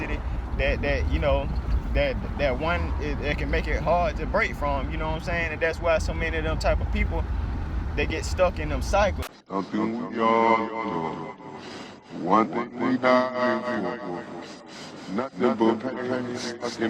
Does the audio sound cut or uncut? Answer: cut